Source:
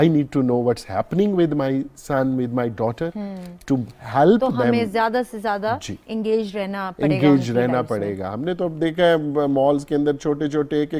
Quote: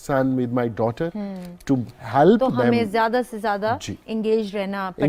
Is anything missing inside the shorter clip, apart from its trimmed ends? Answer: no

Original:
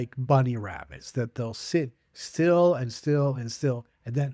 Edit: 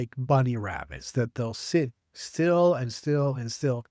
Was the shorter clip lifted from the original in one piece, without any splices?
yes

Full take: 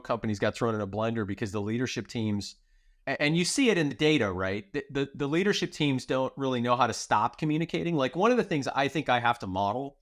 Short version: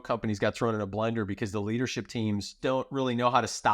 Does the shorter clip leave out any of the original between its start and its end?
yes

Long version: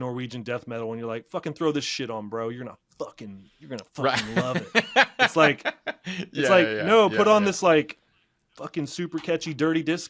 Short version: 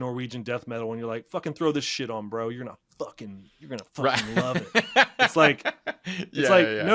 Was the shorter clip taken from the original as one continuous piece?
yes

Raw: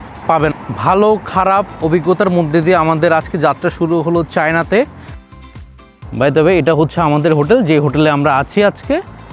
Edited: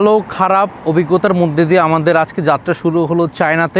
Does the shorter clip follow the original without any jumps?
yes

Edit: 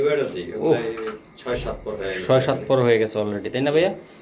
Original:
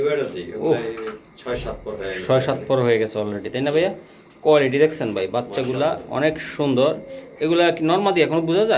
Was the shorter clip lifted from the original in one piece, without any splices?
yes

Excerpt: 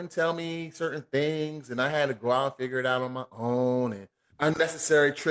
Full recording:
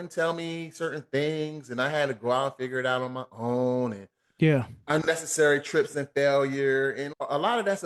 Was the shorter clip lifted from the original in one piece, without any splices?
no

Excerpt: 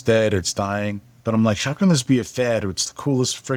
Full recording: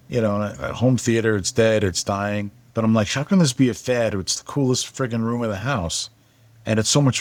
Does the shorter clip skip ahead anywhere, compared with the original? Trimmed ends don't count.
no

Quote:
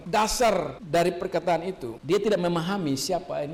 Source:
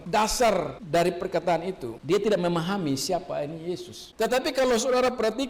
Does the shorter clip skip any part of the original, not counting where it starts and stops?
no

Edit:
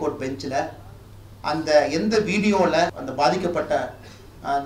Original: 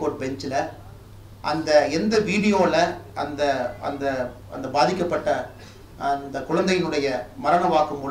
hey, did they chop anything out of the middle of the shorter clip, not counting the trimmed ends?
yes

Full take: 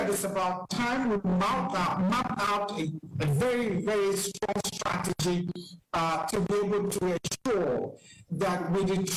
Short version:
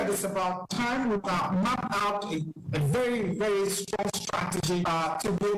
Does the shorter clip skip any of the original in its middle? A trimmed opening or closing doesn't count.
yes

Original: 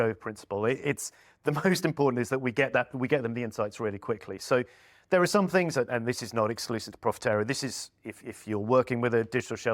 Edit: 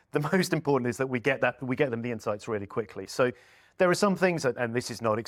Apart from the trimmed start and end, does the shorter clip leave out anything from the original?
no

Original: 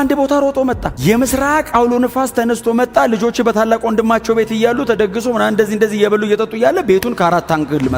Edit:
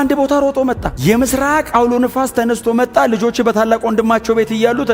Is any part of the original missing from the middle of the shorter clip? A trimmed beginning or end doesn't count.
no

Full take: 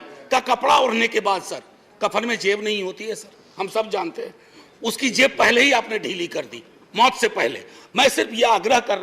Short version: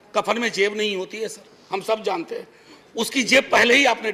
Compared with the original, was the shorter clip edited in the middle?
no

